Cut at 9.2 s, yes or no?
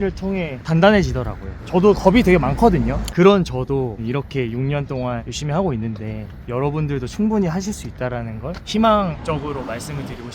yes